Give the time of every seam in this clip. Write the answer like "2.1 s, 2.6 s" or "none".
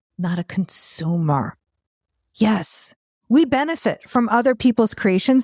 2.8 s